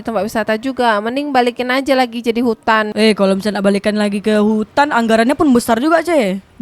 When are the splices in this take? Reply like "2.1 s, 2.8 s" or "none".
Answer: 2.9 s